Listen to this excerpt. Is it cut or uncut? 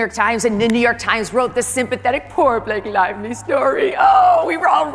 uncut